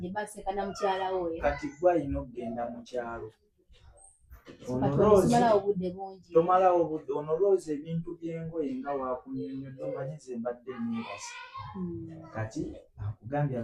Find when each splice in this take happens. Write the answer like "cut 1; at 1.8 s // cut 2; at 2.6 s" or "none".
none